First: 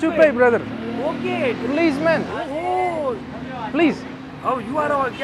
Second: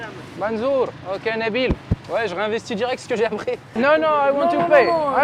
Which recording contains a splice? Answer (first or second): second